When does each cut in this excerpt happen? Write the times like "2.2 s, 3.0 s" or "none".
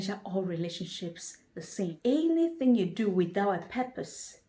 1.9 s